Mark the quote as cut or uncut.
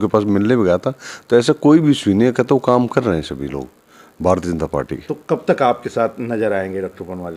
uncut